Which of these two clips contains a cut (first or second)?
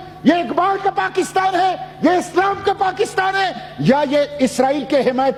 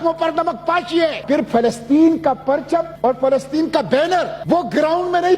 second